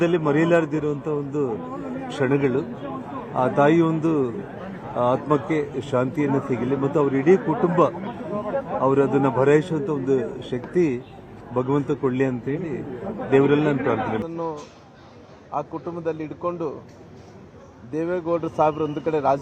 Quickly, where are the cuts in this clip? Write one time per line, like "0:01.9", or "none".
0:14.2

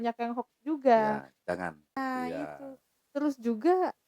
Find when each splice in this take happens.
0:02.0

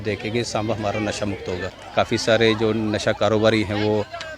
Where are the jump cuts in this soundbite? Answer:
0:01.7

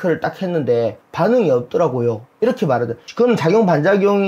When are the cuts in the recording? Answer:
0:01.0
0:03.0

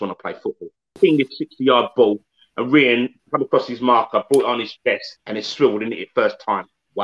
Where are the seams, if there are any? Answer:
0:00.9

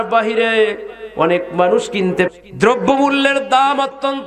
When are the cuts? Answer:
0:02.3

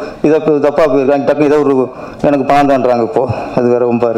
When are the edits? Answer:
none

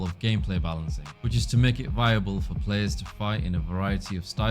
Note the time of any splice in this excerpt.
0:01.9

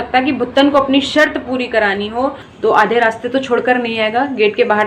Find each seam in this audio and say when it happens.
0:02.4

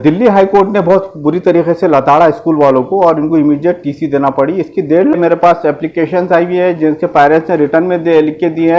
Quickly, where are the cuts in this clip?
0:05.1

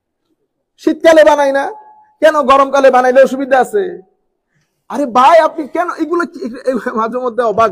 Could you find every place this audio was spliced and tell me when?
none

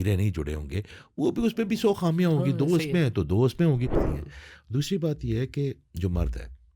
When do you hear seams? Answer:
0:04.0

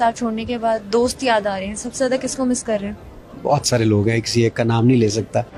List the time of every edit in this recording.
none

